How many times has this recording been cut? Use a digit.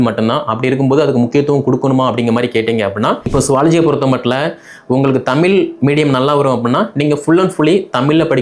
1